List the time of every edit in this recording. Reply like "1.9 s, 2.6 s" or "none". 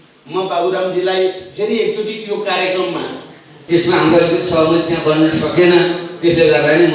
3.6 s